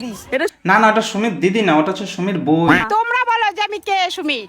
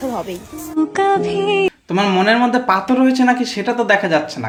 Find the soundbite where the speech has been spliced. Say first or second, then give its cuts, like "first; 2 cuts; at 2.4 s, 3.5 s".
first; 1 cut; at 2.8 s